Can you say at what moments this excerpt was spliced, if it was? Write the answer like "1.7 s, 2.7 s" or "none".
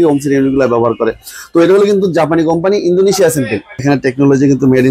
3.8 s